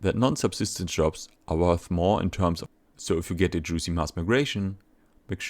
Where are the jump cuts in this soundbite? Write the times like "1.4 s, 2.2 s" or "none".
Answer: 2.7 s